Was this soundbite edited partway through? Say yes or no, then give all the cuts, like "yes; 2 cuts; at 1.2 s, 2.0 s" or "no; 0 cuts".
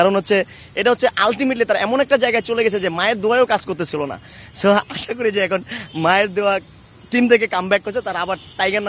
no; 0 cuts